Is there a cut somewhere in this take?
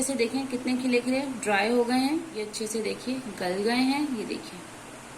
yes; 1 cut; at 2.5 s

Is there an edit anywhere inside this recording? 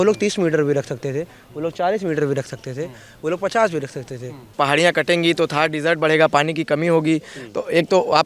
yes; 1 cut; at 4.5 s

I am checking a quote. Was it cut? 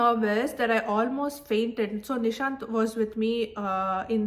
no; 0 cuts

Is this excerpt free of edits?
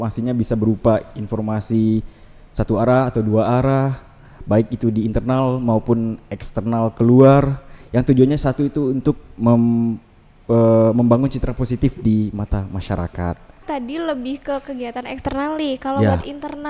no; 1 cut; at 13.6 s

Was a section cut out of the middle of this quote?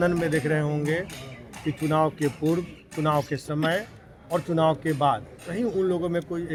no; 0 cuts

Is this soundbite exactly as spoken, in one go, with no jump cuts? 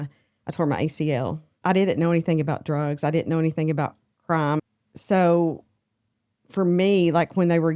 no; 2 cuts; at 1.5 s, 4.6 s

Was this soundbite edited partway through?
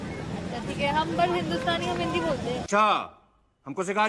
yes; 1 cut; at 2.7 s

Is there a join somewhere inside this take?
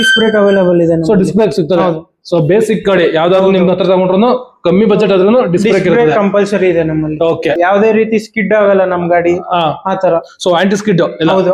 no; 0 cuts

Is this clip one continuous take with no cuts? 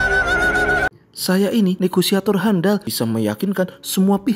no; 1 cut; at 1.1 s

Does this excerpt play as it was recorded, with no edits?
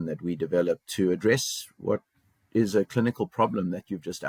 yes; 0 cuts

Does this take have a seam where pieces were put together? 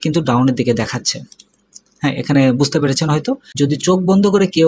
yes; 1 cut; at 3.5 s

